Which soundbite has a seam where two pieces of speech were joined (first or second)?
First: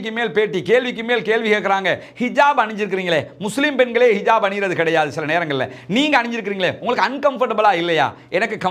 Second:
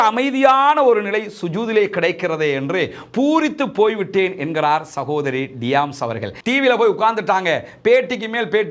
second